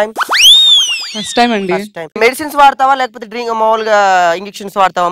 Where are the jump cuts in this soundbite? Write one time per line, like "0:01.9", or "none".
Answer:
0:02.1